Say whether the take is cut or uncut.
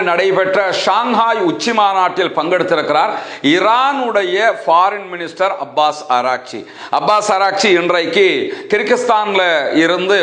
uncut